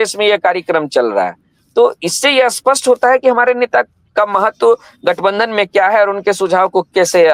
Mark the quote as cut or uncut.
uncut